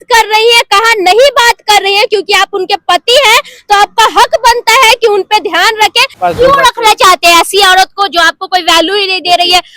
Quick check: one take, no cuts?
no; 1 cut; at 6.2 s

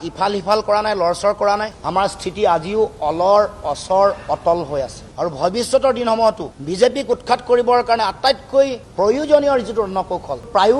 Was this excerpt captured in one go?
yes; 0 cuts

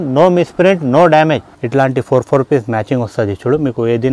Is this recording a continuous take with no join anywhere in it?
no; 1 cut; at 1.5 s

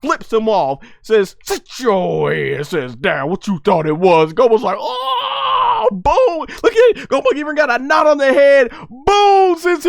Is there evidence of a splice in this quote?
no; 0 cuts

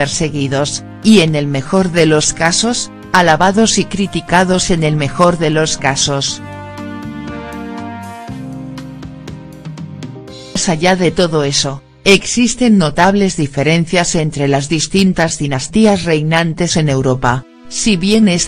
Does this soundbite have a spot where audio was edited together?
yes; 1 cut; at 10.6 s

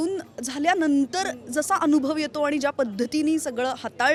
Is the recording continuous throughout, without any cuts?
yes; 0 cuts

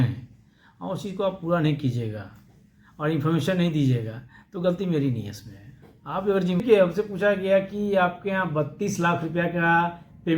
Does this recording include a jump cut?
yes; 1 cut; at 6.6 s

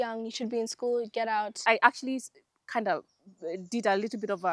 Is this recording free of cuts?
no; 1 cut; at 1.6 s

